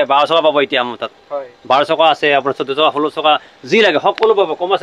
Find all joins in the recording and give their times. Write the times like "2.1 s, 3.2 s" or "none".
none